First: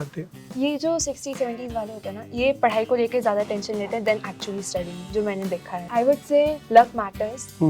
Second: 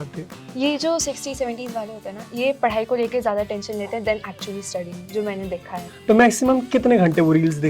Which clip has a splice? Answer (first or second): second